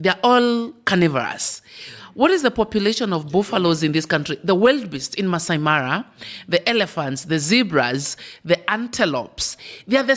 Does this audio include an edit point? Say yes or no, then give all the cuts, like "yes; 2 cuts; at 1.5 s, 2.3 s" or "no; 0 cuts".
no; 0 cuts